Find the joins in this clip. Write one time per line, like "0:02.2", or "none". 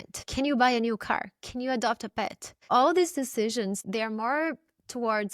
0:02.7
0:03.8